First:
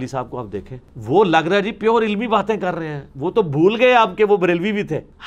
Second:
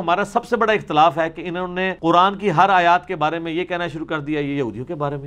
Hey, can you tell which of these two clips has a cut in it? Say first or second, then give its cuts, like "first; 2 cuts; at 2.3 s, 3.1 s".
second; 1 cut; at 1.9 s